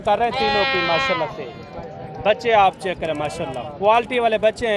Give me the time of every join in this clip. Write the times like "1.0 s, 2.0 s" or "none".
none